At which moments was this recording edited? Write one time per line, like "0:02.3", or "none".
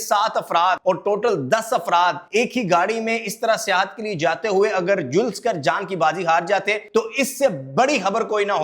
0:00.8
0:02.2
0:06.8